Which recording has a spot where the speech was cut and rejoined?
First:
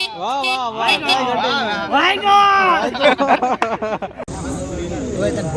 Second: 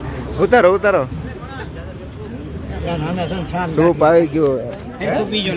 first; 1 cut; at 4.2 s

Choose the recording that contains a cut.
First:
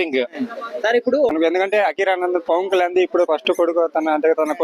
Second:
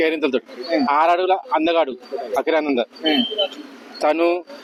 first; 1 cut; at 1.3 s

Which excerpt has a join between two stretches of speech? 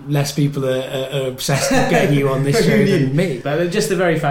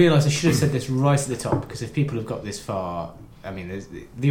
first; 1 cut; at 3.4 s

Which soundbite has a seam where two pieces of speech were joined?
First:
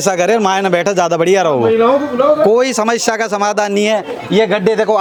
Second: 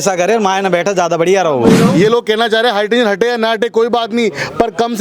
second; 1 cut; at 1.8 s

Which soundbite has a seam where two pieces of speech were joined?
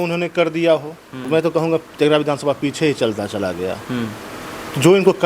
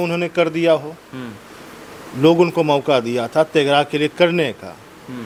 first; 1 cut; at 1.3 s

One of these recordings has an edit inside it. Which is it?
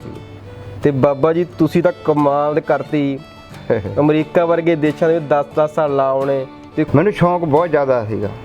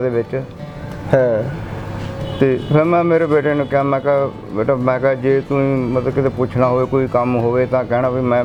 first; 1 cut; at 6.9 s

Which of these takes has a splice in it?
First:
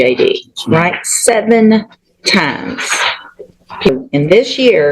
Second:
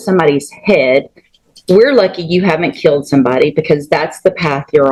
first; 1 cut; at 3.9 s

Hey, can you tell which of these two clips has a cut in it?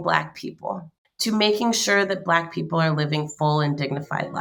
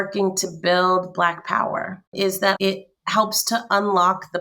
second; 1 cut; at 2.6 s

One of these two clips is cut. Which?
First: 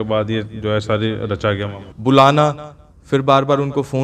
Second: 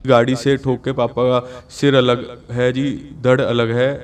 first; 1 cut; at 1.9 s

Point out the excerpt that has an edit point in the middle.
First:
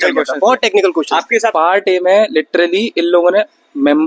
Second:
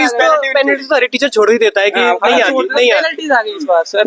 first; 1 cut; at 1.5 s

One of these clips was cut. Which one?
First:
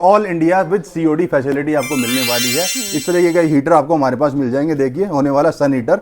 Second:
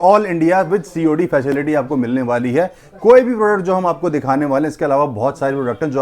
first; 1 cut; at 2.8 s

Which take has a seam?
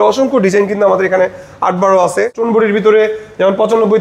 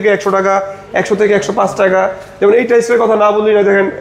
first; 1 cut; at 2.3 s

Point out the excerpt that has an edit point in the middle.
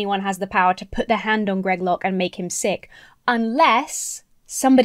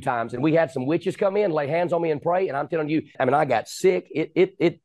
second; 1 cut; at 3.2 s

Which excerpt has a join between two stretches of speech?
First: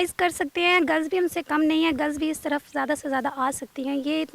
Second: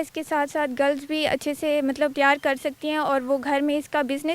second; 1 cut; at 2.1 s

